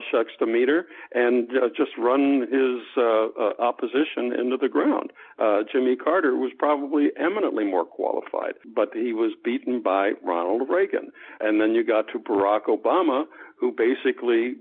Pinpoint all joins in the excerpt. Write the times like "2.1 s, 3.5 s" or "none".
8.6 s, 11.4 s